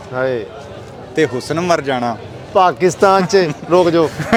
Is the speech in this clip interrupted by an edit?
no; 0 cuts

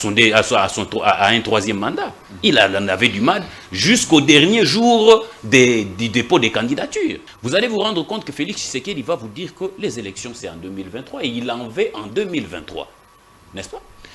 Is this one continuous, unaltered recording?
no; 1 cut; at 7.3 s

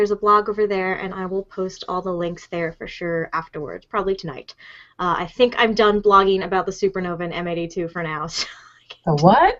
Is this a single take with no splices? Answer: yes; 0 cuts

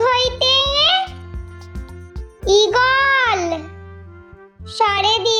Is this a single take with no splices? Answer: yes; 0 cuts

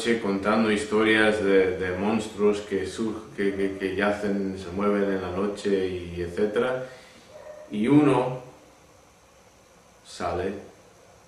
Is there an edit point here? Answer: no; 0 cuts

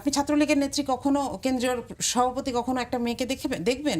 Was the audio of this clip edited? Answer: no; 0 cuts

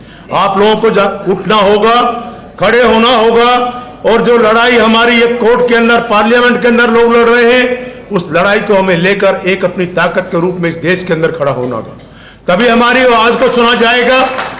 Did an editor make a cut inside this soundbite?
no; 0 cuts

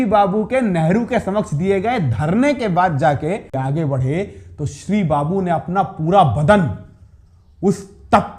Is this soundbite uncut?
no; 1 cut; at 3.6 s

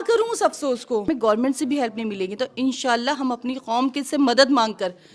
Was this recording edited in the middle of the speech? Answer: yes; 1 cut; at 1.1 s

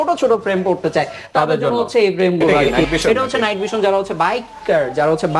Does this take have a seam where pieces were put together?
yes; 1 cut; at 2.6 s

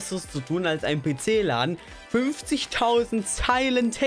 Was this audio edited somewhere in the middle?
no; 0 cuts

